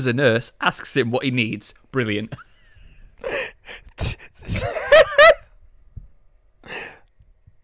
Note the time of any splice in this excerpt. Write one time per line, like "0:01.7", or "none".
none